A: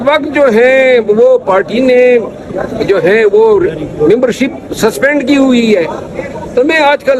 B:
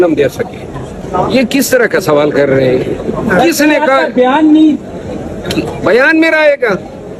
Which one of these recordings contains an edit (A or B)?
B